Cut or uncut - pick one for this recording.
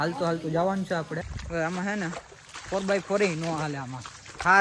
cut